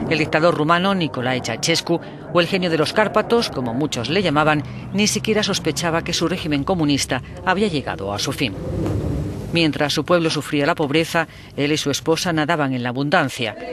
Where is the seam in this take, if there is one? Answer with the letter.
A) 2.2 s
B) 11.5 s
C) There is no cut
C